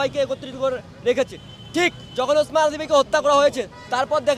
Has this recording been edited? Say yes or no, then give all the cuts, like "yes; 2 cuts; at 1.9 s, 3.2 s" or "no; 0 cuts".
no; 0 cuts